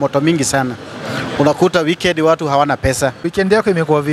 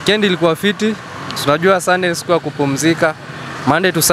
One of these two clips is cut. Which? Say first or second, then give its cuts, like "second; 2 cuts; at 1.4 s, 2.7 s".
first; 1 cut; at 3.2 s